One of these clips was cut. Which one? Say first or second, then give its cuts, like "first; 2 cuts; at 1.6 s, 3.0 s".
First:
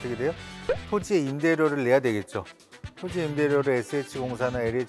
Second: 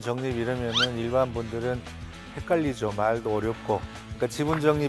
second; 1 cut; at 4.0 s